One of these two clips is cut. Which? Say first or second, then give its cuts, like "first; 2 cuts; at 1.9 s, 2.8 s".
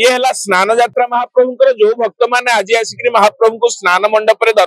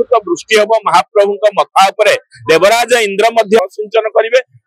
second; 1 cut; at 3.6 s